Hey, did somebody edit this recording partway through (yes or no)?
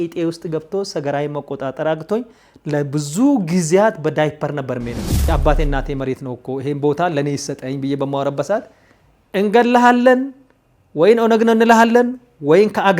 yes